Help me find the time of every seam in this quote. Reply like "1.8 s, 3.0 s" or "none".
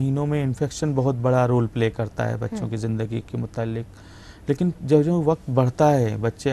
none